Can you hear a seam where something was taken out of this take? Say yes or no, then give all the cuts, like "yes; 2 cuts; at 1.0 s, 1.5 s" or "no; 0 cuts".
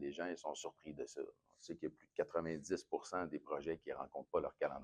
no; 0 cuts